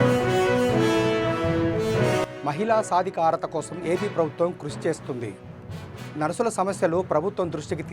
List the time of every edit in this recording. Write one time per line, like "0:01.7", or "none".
0:02.2